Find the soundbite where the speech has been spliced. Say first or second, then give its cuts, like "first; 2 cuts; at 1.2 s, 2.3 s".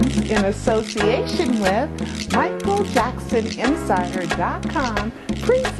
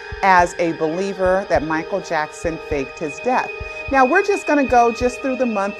first; 1 cut; at 2.2 s